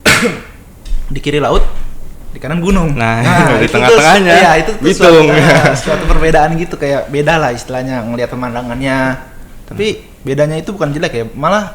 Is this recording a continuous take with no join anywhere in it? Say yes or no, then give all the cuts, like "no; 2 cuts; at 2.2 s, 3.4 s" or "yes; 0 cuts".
yes; 0 cuts